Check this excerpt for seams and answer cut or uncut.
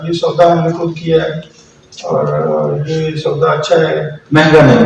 uncut